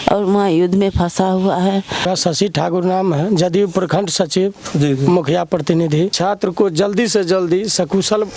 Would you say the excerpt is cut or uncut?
cut